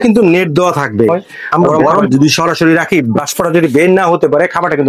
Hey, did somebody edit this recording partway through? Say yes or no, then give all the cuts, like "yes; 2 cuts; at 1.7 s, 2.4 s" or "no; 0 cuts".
yes; 1 cut; at 2.1 s